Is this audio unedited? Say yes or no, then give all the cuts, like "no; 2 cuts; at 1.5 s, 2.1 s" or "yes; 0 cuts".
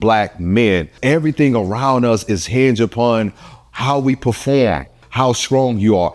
no; 2 cuts; at 0.9 s, 5.0 s